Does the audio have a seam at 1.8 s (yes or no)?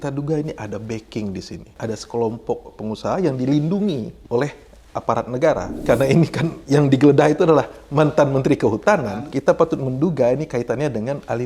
yes